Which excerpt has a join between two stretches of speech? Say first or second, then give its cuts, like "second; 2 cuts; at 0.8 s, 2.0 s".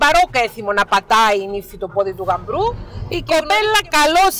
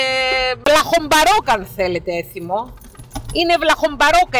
first; 1 cut; at 2.9 s